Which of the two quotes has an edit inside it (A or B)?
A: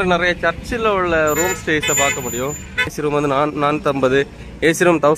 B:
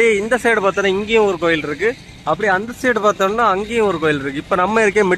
A